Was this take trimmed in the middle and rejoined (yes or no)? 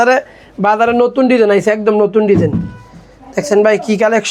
no